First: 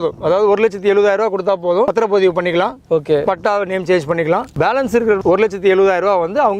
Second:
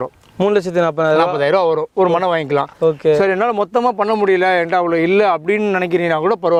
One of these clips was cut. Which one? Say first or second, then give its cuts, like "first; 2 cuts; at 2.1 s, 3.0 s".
first; 2 cuts; at 1.9 s, 5.0 s